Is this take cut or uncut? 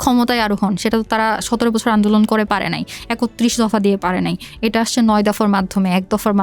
uncut